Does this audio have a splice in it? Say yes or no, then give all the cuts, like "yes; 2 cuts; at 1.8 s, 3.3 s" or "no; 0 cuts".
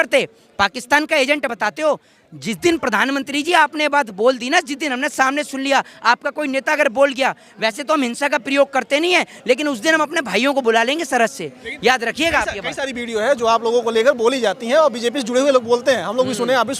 no; 0 cuts